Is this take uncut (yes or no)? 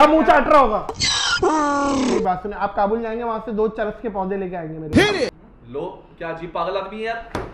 no